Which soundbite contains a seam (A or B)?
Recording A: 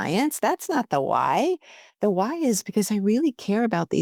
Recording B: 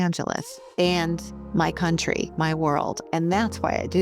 B